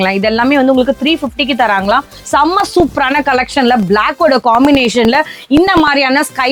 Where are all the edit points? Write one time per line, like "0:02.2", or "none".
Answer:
0:02.1